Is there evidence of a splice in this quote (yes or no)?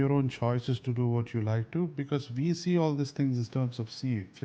no